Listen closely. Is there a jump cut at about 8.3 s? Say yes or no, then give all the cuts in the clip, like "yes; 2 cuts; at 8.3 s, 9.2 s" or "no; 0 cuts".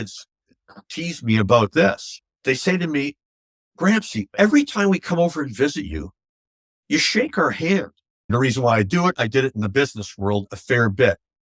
yes; 1 cut; at 8.3 s